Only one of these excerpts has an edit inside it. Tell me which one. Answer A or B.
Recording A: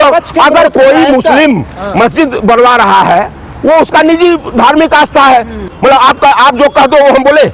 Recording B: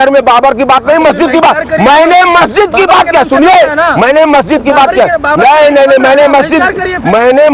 A